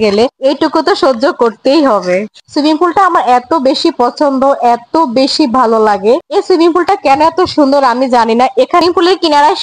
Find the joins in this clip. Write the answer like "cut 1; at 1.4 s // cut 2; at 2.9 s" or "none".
cut 1; at 2.3 s // cut 2; at 8.8 s